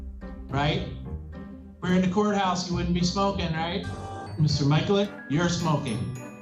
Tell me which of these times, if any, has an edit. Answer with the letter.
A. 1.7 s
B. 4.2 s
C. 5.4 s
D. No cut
B